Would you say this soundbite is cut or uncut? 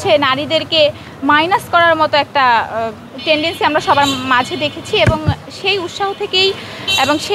uncut